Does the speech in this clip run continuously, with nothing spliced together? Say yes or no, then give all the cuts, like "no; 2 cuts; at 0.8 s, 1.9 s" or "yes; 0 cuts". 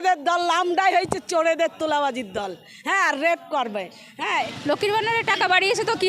no; 1 cut; at 4.5 s